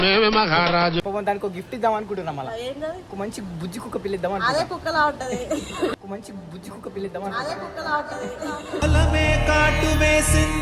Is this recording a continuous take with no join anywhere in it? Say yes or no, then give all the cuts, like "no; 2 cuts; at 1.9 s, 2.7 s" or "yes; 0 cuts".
no; 1 cut; at 1.0 s